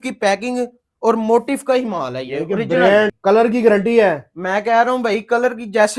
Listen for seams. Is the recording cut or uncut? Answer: cut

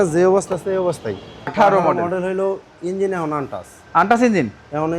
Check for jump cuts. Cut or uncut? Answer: cut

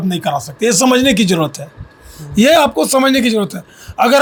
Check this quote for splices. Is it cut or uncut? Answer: uncut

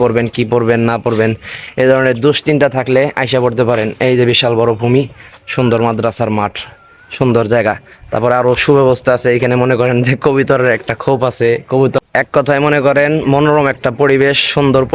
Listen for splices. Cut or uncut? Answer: uncut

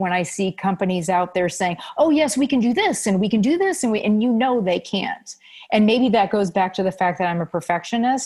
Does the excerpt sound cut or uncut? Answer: uncut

